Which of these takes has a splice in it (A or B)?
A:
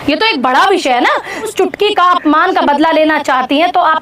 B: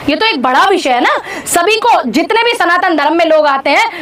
A